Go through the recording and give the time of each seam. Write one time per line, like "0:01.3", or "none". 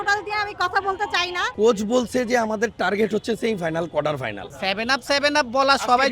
0:01.4
0:04.4